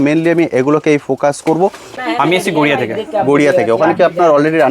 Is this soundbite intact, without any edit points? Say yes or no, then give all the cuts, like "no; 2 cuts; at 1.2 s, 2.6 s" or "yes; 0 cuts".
no; 1 cut; at 1.9 s